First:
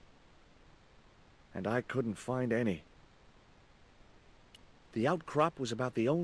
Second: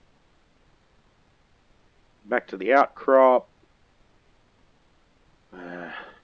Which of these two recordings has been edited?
first; 3 cuts; at 1.5 s, 2.9 s, 4.9 s

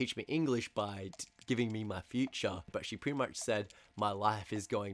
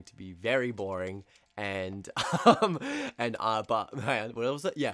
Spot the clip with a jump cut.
first; 1 cut; at 2.7 s

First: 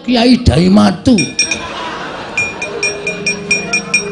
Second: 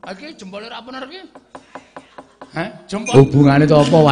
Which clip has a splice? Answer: second; 1 cut; at 3.1 s

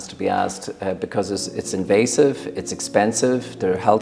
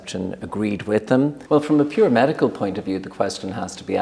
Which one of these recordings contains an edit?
second; 1 cut; at 1.4 s

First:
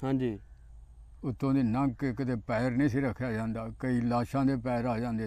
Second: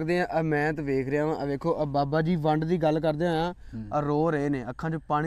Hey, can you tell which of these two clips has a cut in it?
first; 1 cut; at 3.8 s

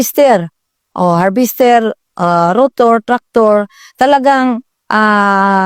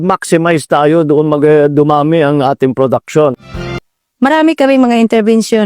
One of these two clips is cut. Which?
second; 1 cut; at 3.9 s

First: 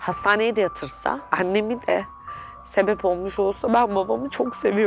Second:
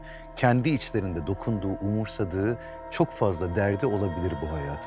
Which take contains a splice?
first; 1 cut; at 1.2 s

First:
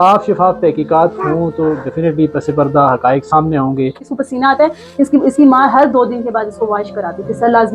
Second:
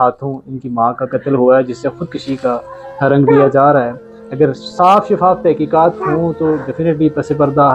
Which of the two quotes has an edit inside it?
first; 1 cut; at 4.2 s

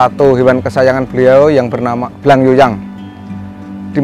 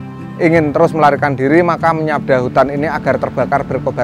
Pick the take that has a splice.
first; 1 cut; at 2.1 s

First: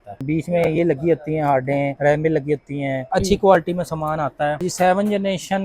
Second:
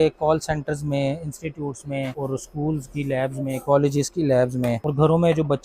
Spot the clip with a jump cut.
first; 2 cuts; at 3.0 s, 4.6 s

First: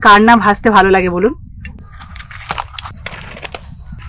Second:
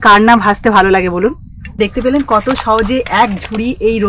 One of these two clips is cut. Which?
second; 1 cut; at 1.8 s

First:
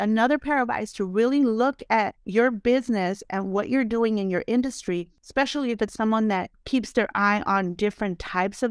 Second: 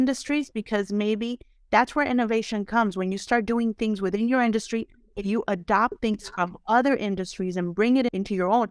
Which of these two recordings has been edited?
first; 3 cuts; at 2.2 s, 5.1 s, 6.6 s

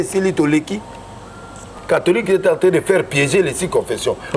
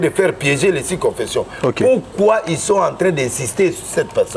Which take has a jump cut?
first; 1 cut; at 1.7 s

